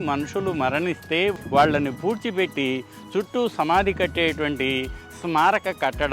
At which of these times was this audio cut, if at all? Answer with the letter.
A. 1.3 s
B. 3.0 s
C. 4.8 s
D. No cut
A